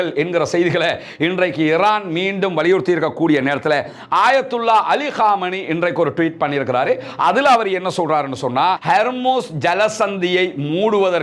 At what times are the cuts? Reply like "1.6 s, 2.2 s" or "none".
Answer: 8.8 s

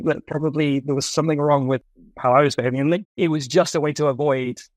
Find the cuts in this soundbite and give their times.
1.8 s, 3.0 s

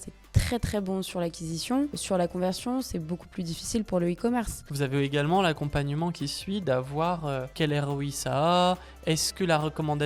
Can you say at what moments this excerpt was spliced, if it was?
2.0 s, 4.6 s, 7.5 s

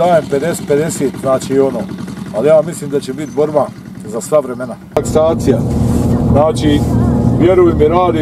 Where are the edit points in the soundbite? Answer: 5.0 s

